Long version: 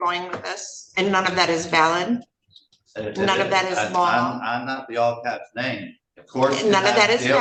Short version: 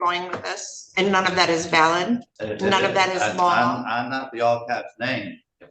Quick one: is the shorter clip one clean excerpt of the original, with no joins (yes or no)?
no